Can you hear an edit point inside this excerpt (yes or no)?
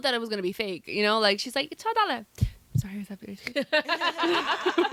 no